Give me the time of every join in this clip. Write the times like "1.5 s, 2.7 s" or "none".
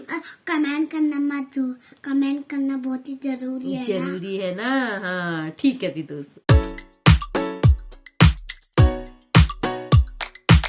6.2 s